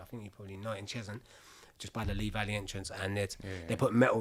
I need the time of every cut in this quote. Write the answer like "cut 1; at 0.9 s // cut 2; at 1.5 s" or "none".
none